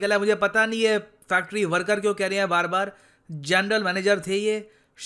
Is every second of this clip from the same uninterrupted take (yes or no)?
yes